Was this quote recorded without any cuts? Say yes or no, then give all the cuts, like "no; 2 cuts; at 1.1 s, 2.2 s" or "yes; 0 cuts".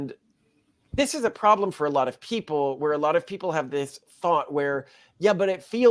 no; 1 cut; at 0.9 s